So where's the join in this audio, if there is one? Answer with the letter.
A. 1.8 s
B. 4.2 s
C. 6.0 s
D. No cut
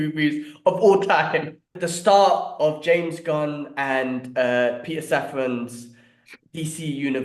A